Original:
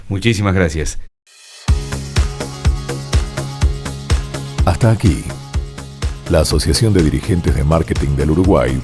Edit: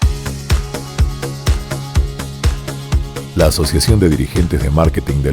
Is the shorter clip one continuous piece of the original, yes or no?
no